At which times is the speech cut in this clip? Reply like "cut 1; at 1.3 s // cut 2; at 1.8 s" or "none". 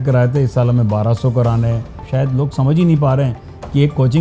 cut 1; at 2.0 s